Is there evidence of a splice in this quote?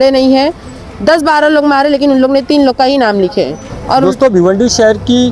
yes; 1 cut; at 4.0 s

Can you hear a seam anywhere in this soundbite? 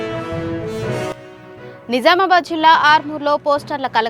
yes; 1 cut; at 1.3 s

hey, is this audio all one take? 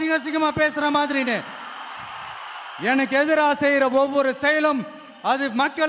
yes; 0 cuts

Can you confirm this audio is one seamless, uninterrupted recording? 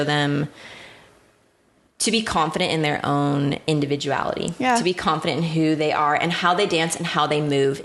yes; 0 cuts

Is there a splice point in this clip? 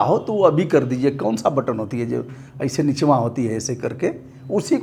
no; 0 cuts

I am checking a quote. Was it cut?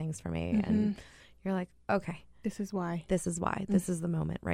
no; 0 cuts

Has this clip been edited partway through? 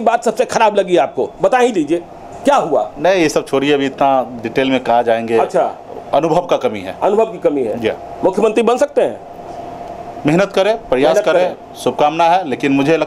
no; 0 cuts

